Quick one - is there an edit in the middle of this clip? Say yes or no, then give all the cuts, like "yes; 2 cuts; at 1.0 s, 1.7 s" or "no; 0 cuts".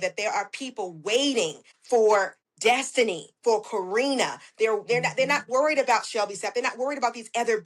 yes; 2 cuts; at 1.7 s, 2.4 s